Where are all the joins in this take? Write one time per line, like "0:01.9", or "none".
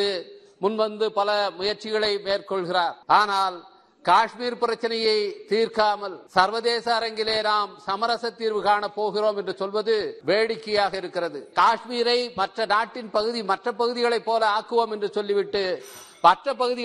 0:03.0
0:06.1
0:10.1
0:11.5